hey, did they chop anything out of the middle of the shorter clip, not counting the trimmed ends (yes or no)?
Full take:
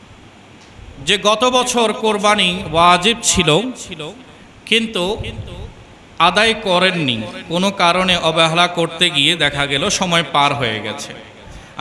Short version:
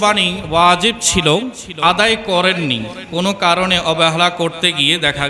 yes